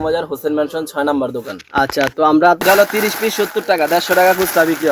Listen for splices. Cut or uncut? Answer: cut